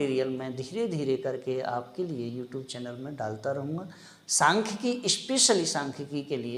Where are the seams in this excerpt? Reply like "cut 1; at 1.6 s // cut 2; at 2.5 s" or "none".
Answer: none